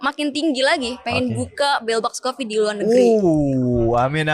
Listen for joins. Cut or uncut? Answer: uncut